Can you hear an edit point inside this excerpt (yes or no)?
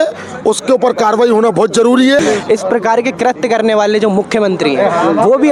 yes